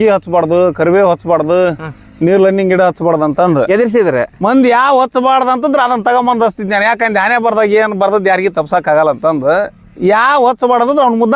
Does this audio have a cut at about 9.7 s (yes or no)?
no